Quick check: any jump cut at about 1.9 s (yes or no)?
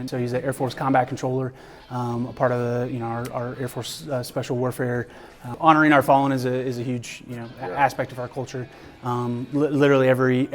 no